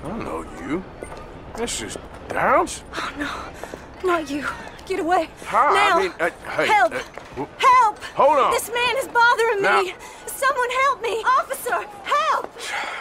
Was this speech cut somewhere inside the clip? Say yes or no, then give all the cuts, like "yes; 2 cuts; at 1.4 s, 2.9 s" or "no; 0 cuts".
no; 0 cuts